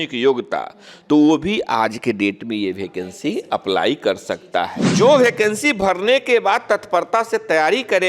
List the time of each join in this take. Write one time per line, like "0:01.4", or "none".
0:04.8